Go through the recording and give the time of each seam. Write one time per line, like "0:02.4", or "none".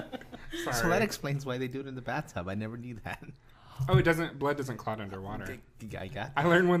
none